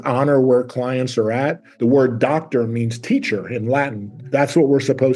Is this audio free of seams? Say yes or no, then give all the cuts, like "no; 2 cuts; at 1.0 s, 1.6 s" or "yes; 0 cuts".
no; 2 cuts; at 1.7 s, 4.2 s